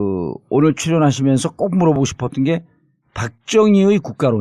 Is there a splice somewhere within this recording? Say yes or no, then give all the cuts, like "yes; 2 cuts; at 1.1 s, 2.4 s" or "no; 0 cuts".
yes; 1 cut; at 3.5 s